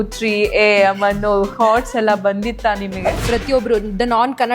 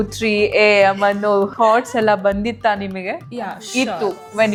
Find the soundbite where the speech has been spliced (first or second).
first